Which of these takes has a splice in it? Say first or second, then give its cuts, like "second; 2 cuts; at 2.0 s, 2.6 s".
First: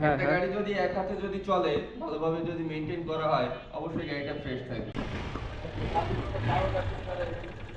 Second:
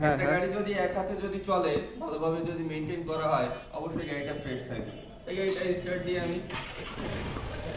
first; 1 cut; at 4.9 s